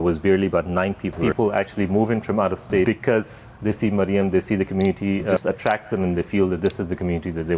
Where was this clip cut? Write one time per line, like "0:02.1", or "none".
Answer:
0:01.2
0:02.9
0:05.4